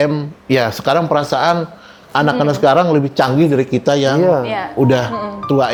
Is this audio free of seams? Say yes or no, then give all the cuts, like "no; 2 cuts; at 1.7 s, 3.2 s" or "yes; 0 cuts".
yes; 0 cuts